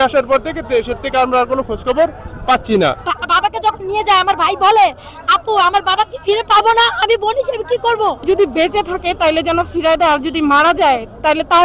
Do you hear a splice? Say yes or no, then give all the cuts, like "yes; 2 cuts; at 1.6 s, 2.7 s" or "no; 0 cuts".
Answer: yes; 2 cuts; at 3.1 s, 8.2 s